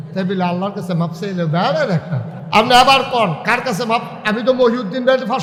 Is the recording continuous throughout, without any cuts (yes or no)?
yes